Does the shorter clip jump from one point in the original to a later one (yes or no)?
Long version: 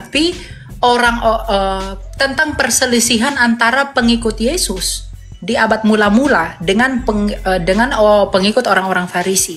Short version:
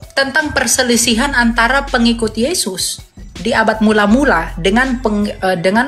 no